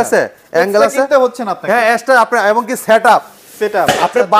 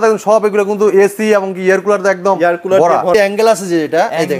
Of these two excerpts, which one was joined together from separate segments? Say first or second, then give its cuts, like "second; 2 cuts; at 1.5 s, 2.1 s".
second; 1 cut; at 3.1 s